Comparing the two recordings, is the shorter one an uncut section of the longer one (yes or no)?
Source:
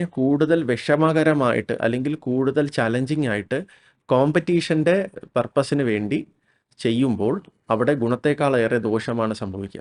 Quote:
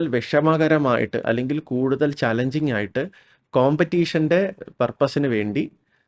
yes